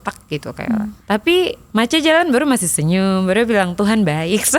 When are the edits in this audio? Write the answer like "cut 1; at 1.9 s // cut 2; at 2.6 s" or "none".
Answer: cut 1; at 1.0 s

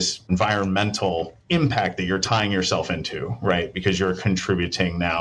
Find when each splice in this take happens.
none

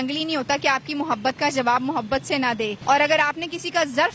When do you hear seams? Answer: cut 1; at 2.8 s

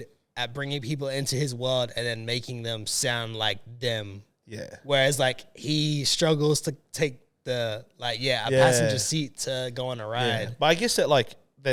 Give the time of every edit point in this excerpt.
none

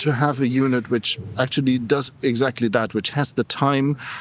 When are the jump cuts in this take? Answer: none

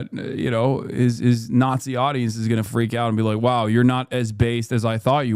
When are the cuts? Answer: cut 1; at 2.6 s

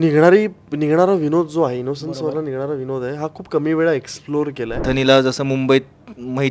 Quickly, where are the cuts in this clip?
cut 1; at 4.8 s

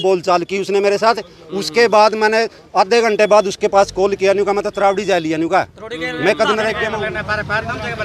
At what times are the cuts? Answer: cut 1; at 6.9 s

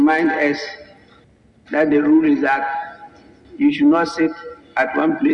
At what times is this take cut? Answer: none

